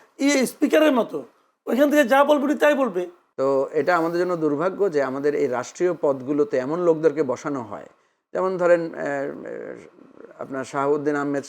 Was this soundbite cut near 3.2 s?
yes; 1 cut; at 3.2 s

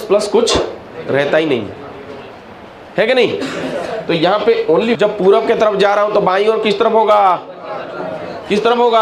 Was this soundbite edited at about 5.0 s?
yes; 1 cut; at 5.0 s

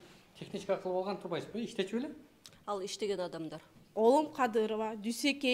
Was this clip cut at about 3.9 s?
yes; 1 cut; at 3.9 s

